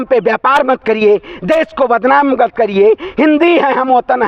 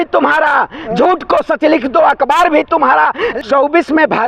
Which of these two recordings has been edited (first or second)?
second